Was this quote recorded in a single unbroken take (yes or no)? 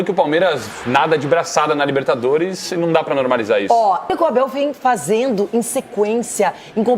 no